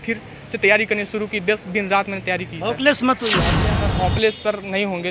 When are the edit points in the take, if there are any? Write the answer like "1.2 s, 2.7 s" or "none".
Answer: 3.7 s